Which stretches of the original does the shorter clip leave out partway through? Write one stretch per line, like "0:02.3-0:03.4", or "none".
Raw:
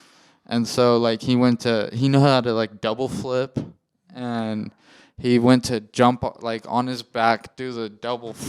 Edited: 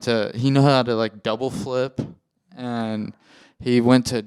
none